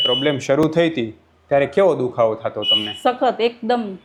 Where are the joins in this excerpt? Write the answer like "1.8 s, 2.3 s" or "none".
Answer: none